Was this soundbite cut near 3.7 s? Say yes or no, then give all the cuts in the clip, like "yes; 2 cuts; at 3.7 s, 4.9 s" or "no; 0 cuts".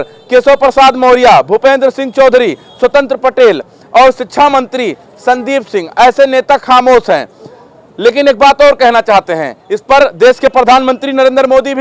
no; 0 cuts